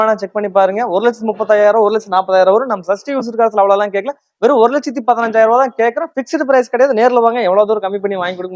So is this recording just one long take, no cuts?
yes; 0 cuts

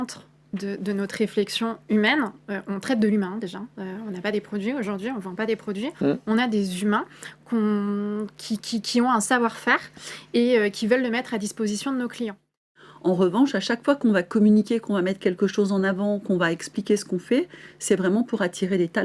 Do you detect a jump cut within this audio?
yes; 1 cut; at 12.7 s

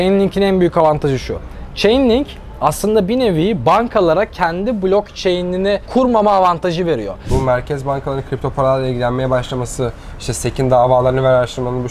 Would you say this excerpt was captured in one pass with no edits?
no; 1 cut; at 7.2 s

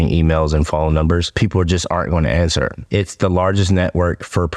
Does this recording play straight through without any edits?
no; 2 cuts; at 1.3 s, 2.8 s

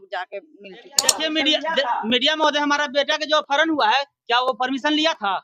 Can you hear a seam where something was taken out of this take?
yes; 1 cut; at 1.0 s

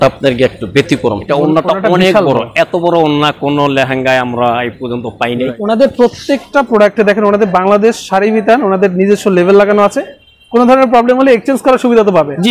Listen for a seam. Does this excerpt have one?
yes; 2 cuts; at 1.2 s, 5.6 s

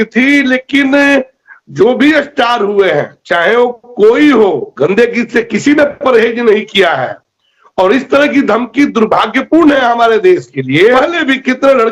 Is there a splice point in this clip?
yes; 1 cut; at 11.0 s

